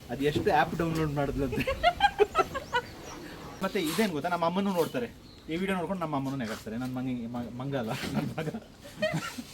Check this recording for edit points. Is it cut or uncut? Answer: cut